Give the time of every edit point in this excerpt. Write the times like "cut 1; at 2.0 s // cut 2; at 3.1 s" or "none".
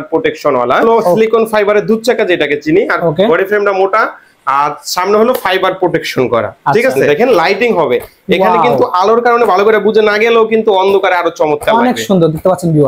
cut 1; at 0.8 s // cut 2; at 7.0 s